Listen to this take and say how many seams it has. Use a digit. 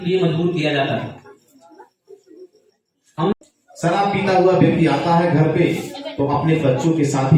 1